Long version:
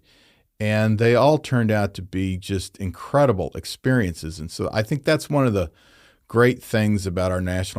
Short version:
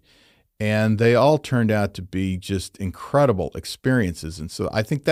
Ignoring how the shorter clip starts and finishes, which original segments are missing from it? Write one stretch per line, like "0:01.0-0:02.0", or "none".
none